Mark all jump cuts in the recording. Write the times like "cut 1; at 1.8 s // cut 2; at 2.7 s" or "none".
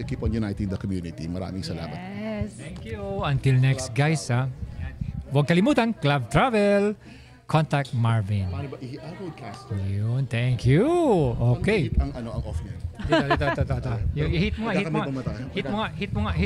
none